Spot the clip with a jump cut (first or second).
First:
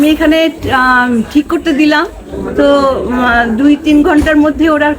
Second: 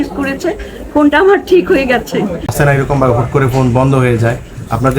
second